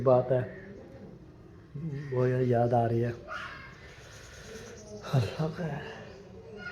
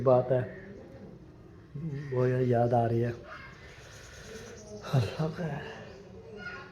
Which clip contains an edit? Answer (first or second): second